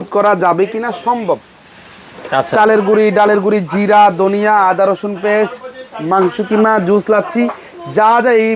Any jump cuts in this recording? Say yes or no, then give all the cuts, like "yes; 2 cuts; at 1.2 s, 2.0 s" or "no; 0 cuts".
no; 0 cuts